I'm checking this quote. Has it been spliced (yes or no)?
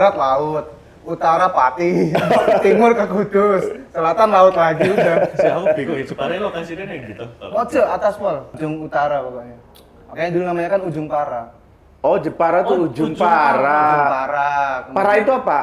yes